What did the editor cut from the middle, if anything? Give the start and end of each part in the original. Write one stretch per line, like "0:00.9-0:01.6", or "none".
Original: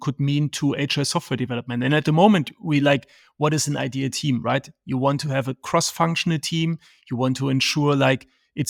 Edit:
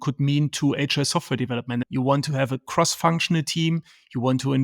0:01.8-0:04.8